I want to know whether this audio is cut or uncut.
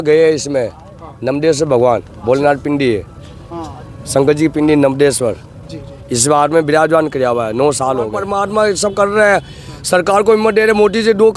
cut